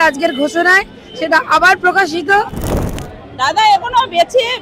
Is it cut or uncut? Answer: cut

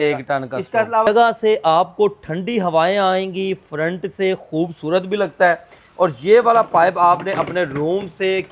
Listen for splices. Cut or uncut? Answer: cut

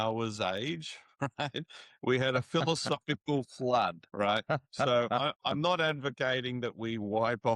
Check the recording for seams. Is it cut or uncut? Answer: cut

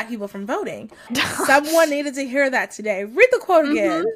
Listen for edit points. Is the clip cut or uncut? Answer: cut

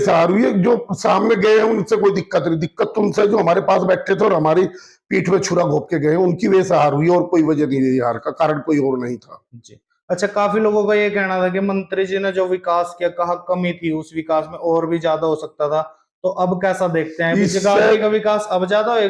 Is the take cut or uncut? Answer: uncut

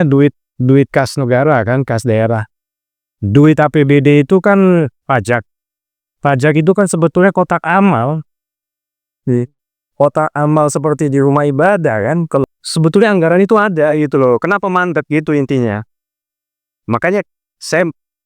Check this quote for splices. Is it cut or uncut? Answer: cut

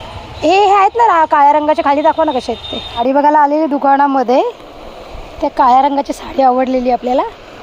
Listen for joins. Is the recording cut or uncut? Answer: cut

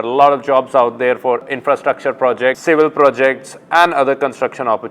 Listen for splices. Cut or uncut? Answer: cut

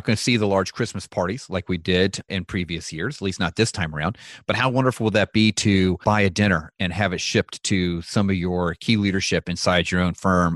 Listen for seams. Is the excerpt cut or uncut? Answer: cut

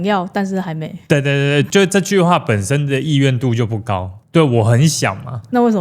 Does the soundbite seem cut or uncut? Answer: cut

